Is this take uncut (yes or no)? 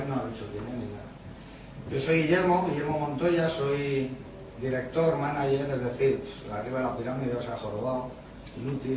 yes